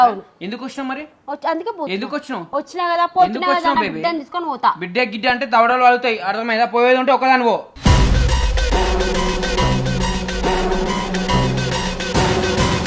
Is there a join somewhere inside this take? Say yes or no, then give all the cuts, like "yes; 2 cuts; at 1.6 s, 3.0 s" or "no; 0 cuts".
no; 0 cuts